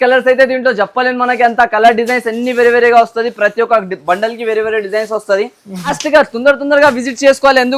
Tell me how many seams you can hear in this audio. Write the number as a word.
one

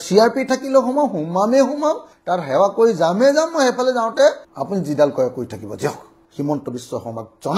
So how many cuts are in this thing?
two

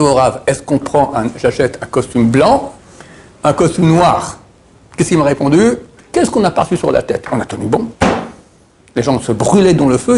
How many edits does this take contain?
one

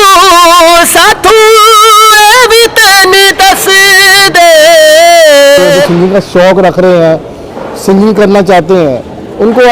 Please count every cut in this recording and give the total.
one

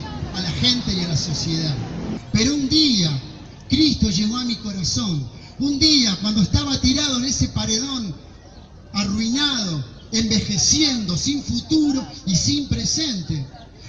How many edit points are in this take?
one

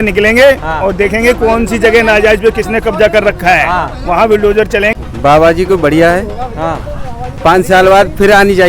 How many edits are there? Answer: one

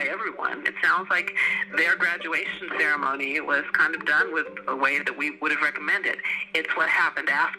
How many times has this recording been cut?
one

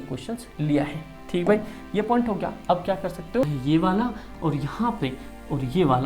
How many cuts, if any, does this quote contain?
one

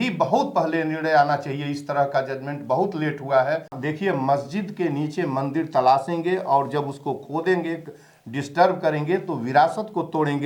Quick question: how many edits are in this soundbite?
one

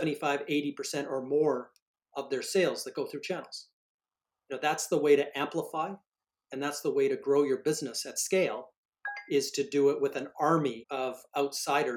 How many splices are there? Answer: one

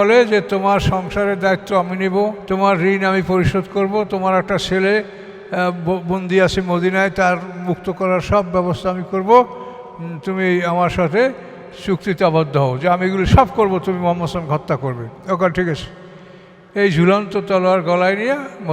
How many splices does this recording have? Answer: one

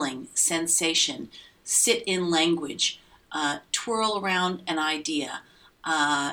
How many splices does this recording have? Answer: zero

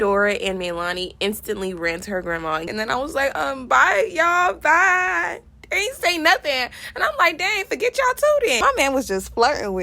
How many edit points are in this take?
two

